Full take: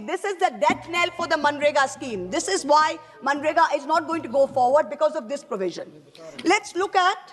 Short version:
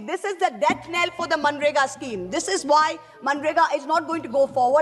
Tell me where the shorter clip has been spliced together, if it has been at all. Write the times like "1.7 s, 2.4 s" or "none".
none